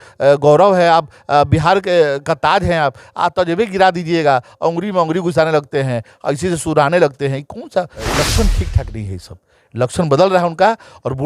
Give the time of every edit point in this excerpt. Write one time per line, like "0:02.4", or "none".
0:08.2